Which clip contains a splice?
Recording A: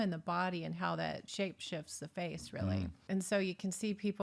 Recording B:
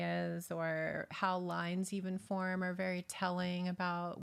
A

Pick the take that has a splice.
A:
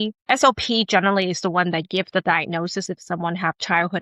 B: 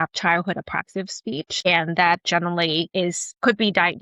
B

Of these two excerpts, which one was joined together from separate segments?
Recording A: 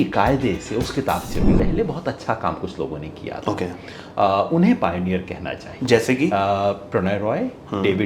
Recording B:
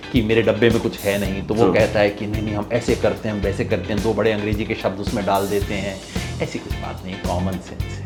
A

